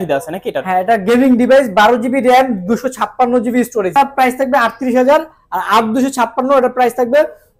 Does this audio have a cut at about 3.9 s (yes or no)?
yes